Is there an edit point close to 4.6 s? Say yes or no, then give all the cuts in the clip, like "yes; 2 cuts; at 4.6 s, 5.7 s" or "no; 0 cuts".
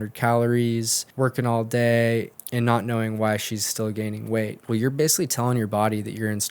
yes; 3 cuts; at 1.0 s, 2.4 s, 4.6 s